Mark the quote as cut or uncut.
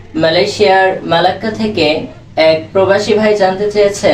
cut